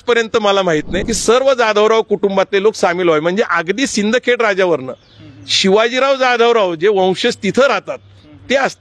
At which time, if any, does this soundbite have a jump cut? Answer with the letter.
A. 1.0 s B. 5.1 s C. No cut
A